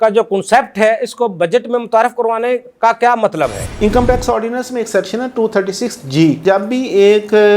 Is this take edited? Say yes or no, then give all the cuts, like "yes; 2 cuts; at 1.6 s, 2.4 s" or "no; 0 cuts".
yes; 2 cuts; at 3.7 s, 6.4 s